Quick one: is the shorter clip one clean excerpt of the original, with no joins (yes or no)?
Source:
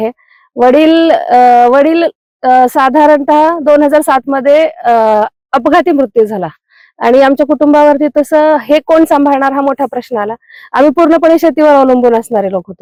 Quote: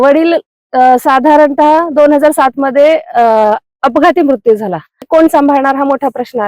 no